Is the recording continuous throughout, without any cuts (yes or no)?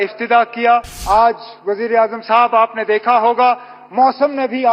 no